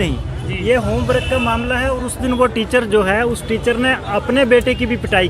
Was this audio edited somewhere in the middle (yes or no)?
no